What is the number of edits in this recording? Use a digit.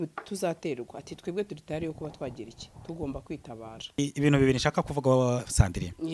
1